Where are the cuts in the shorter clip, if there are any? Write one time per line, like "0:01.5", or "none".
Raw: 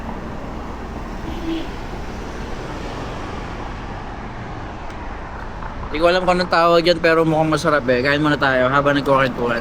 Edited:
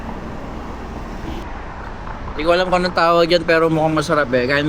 0:01.4

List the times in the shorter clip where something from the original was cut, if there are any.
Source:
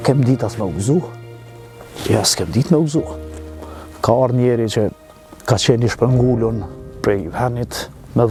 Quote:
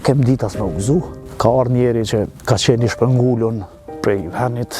0:01.2
0:02.4

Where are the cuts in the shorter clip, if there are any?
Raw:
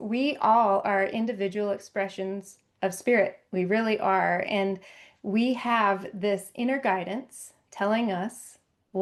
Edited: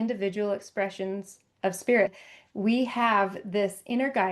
0:02.2

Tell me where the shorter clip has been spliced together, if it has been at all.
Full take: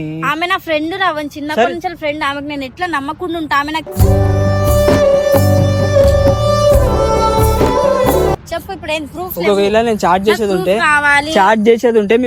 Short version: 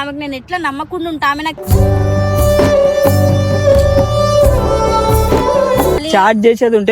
0:06.0

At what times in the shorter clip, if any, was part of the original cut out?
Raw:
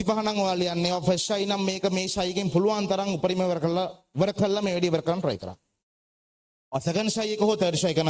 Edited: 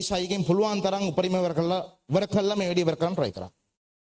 none

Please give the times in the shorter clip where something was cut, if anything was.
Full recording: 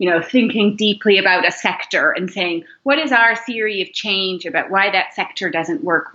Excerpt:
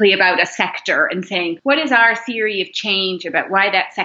0:01.6

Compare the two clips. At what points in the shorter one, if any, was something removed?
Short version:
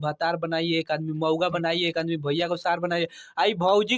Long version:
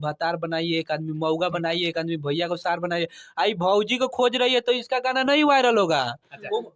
none

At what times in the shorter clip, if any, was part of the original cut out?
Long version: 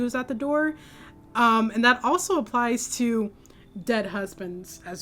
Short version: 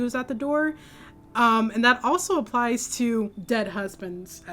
0:03.4

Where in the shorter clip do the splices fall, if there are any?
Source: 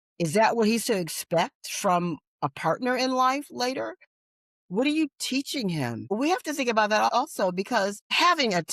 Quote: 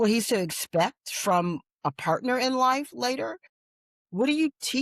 none

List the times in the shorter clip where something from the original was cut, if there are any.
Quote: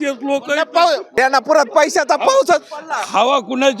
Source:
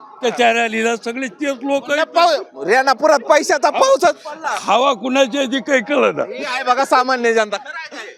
0:01.1

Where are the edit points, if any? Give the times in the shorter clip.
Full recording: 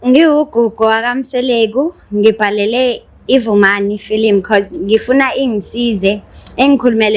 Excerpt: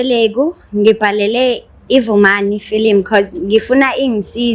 none

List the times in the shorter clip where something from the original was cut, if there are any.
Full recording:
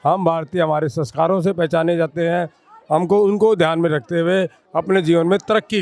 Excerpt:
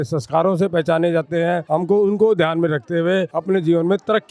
0:01.6
0:03.3

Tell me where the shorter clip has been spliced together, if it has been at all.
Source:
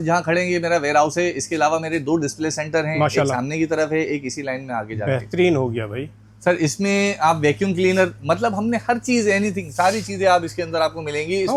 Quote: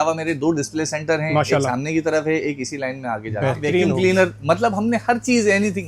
0:03.9

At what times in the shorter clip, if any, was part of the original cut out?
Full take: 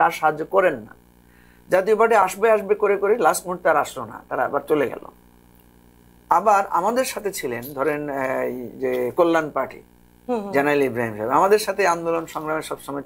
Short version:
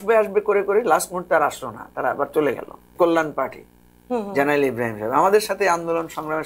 0:02.9

